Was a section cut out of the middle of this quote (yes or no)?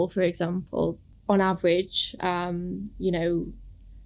yes